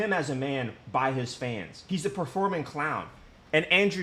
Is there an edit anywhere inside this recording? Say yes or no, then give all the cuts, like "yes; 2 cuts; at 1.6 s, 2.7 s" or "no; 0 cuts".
yes; 1 cut; at 1.7 s